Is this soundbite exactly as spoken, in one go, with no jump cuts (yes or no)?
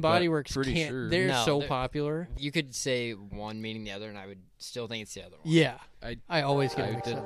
no